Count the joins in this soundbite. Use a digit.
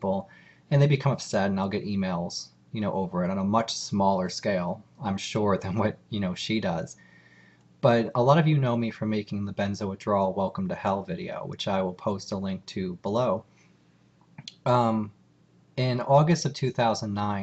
1